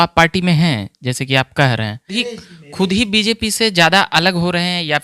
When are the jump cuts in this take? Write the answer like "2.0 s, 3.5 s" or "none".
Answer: 2.2 s